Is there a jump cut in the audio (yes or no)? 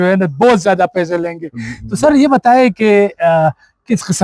no